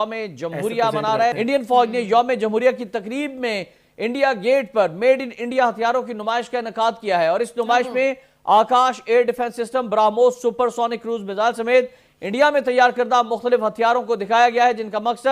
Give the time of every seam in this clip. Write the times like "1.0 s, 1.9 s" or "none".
1.4 s